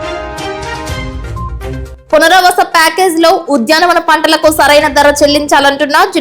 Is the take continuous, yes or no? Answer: no